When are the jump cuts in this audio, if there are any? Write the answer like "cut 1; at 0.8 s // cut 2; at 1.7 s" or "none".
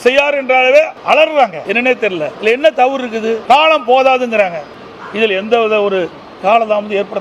cut 1; at 2.0 s // cut 2; at 3.4 s